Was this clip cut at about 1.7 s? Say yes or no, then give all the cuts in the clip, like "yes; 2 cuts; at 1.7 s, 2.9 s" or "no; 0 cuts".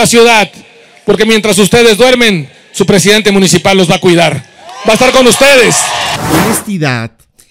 no; 1 cut; at 6.1 s